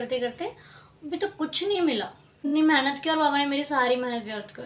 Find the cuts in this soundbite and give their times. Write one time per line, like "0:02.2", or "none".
0:02.5